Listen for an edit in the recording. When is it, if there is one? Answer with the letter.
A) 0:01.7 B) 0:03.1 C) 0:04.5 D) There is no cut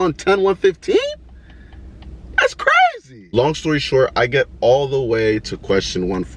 B